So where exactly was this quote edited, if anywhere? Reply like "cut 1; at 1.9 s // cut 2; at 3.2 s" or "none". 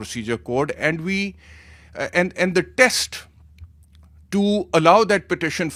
none